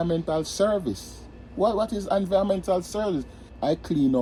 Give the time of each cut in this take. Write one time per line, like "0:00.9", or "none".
none